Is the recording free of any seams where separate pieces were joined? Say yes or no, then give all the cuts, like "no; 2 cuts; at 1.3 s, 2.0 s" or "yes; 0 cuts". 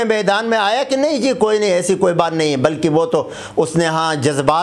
yes; 0 cuts